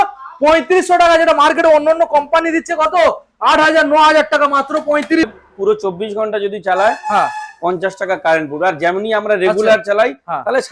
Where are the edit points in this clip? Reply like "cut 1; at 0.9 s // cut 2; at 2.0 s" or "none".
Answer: cut 1; at 5.2 s

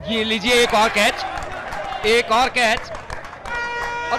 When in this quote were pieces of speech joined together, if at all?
none

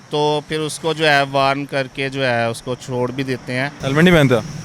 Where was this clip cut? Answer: cut 1; at 3.8 s

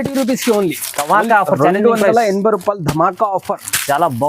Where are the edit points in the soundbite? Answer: none

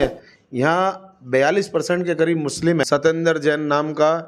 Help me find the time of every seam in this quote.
cut 1; at 2.8 s

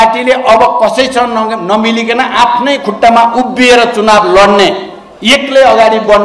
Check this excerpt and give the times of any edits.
none

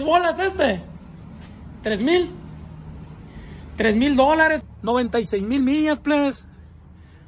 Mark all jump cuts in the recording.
cut 1; at 4.6 s

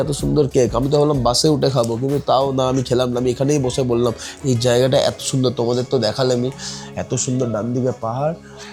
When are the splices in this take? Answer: none

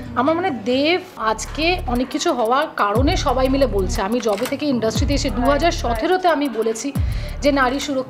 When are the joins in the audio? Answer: cut 1; at 1.2 s

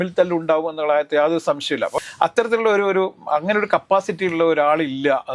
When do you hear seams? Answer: cut 1; at 1.9 s

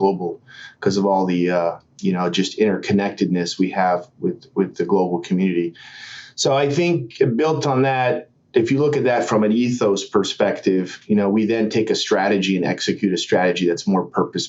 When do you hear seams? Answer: none

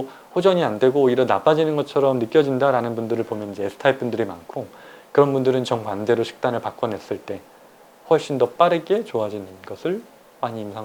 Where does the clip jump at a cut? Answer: none

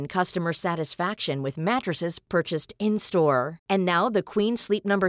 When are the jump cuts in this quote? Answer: none

